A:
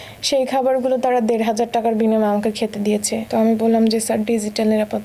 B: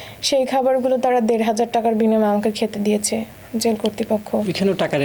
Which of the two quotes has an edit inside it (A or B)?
A